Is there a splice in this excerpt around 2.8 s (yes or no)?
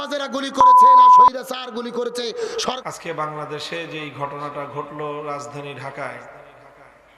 yes